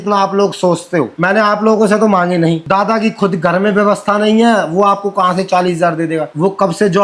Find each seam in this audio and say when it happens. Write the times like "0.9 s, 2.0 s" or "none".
1.1 s, 2.6 s